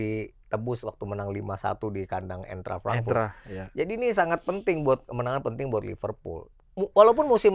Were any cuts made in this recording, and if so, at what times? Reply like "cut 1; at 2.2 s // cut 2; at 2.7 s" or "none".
cut 1; at 6.6 s